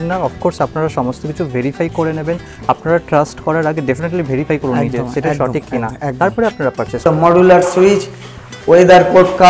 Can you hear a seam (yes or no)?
yes